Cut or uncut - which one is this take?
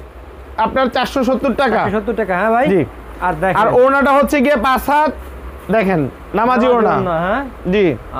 uncut